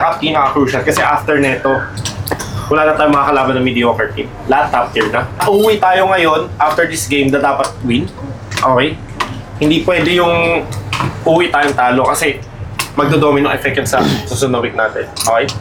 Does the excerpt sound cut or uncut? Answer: uncut